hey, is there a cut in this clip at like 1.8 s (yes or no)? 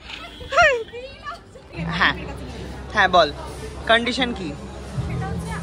yes